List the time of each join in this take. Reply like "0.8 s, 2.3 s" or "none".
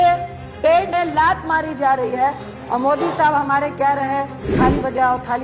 0.9 s, 2.5 s, 4.4 s